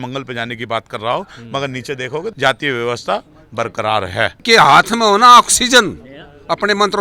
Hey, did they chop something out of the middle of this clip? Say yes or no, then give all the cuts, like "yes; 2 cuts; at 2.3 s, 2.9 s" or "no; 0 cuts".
yes; 2 cuts; at 2.3 s, 4.4 s